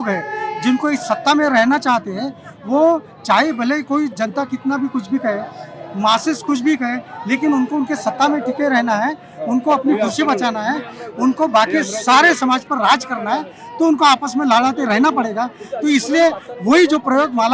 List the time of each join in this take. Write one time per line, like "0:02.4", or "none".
none